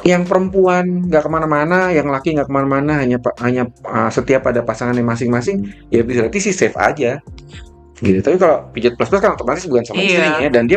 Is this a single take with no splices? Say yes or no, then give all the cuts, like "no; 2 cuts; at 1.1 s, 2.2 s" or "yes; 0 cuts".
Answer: yes; 0 cuts